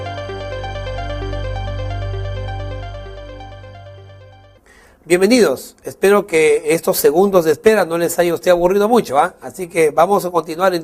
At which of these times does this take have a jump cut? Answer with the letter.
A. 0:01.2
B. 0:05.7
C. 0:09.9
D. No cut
C